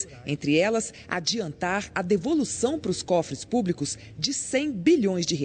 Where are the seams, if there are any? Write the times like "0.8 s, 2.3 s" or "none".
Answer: 4.3 s

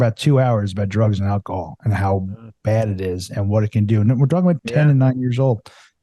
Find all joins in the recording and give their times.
4.6 s

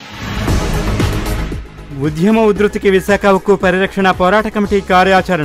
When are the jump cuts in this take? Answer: none

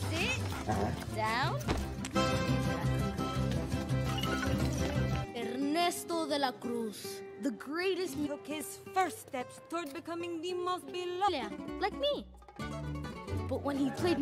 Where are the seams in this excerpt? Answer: none

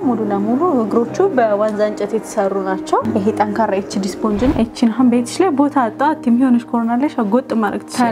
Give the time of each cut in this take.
4.5 s

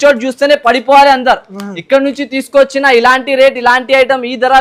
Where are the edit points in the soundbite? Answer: none

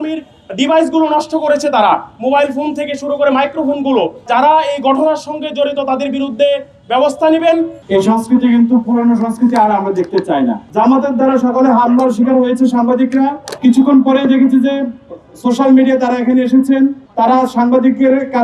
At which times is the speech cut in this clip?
none

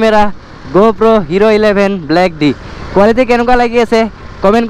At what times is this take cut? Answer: none

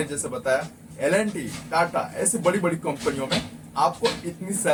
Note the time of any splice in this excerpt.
none

